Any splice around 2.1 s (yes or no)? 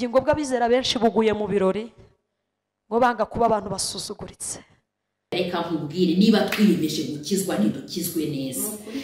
no